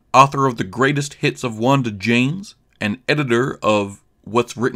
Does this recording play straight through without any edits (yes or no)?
yes